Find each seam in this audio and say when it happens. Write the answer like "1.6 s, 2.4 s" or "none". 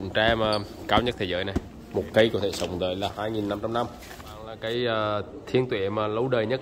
1.8 s, 3.1 s, 4.5 s